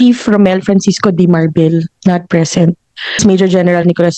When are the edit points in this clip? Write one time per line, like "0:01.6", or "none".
0:03.2